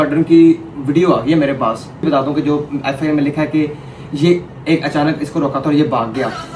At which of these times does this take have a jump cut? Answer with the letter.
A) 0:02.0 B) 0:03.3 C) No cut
A